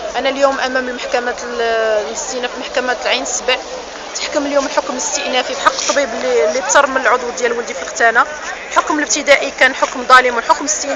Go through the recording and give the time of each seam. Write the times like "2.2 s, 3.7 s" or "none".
none